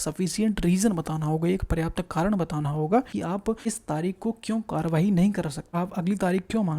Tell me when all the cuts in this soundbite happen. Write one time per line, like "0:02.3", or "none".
0:03.4
0:05.6